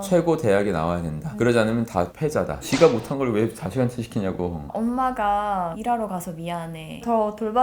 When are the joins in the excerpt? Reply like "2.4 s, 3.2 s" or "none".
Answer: 2.6 s, 4.7 s